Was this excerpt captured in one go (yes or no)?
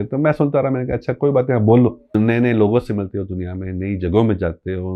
no